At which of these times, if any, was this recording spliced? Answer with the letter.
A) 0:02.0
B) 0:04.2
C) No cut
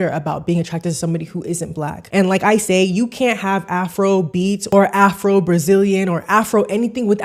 A